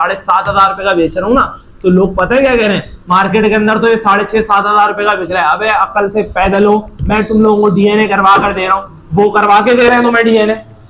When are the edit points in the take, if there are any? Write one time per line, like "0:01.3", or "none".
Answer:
none